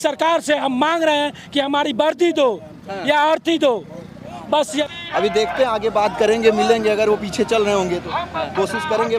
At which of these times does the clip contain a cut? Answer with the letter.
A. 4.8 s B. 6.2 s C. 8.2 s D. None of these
A